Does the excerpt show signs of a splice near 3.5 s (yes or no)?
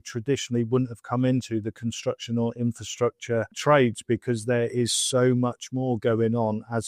yes